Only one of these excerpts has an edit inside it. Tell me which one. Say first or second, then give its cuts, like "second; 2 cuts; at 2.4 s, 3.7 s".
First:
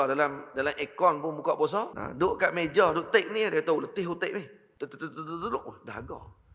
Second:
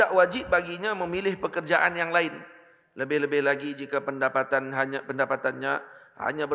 first; 2 cuts; at 2.0 s, 4.6 s